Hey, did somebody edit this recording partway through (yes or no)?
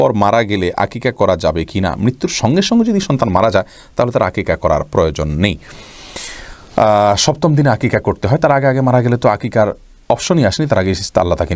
no